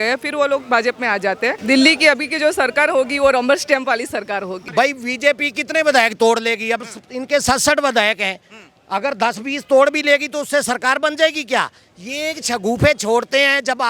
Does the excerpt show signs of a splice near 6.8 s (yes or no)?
no